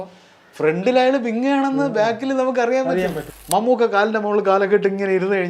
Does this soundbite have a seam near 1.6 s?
no; 1 cut; at 3.2 s

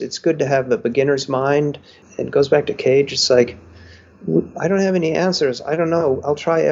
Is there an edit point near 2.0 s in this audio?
yes; 1 cut; at 2.0 s

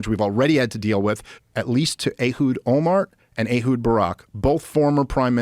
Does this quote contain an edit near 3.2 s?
no; 1 cut; at 1.3 s

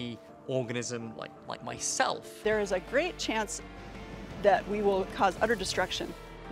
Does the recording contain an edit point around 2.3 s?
yes; 1 cut; at 2.3 s

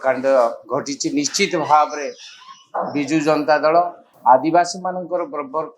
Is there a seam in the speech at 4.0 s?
yes; 1 cut; at 4.0 s

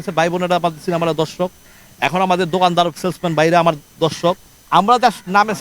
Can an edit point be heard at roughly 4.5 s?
yes; 1 cut; at 4.5 s

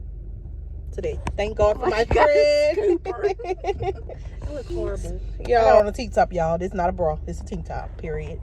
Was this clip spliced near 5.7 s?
yes; 1 cut; at 5.7 s

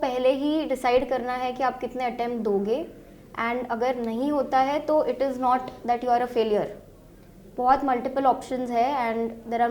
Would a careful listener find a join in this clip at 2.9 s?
no; 0 cuts

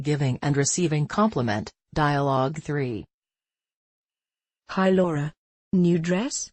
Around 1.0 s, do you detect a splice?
no; 1 cut; at 2.5 s

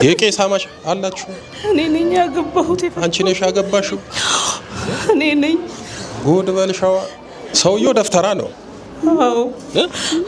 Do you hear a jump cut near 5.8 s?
no; 1 cut; at 7.5 s

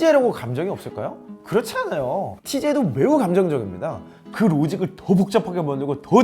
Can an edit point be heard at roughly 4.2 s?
yes; 1 cut; at 4.2 s

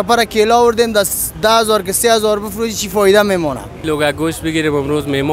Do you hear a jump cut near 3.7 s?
yes; 1 cut; at 3.7 s

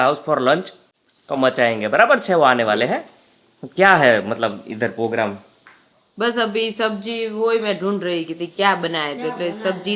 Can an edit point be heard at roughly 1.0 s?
no; 0 cuts

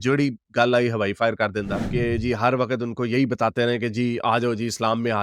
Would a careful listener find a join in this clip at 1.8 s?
yes; 1 cut; at 1.8 s

